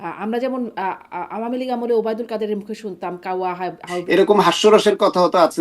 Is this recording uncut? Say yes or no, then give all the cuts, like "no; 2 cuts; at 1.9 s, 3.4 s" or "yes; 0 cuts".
no; 1 cut; at 3.9 s